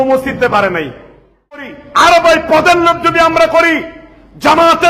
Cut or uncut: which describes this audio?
cut